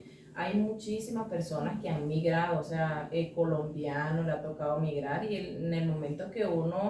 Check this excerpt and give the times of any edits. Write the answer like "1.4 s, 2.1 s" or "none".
none